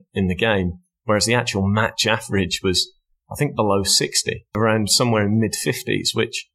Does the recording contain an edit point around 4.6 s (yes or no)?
yes